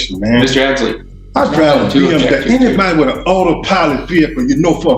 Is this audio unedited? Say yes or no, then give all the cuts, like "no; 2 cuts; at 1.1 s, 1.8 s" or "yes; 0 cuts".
yes; 0 cuts